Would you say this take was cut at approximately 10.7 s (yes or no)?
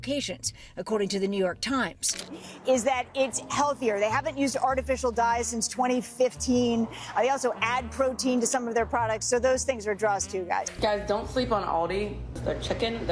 yes